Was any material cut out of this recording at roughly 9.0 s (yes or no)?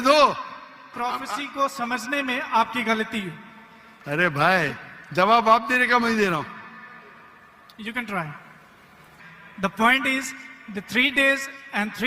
yes